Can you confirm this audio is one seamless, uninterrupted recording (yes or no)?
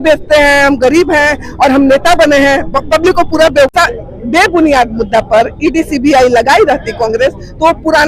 no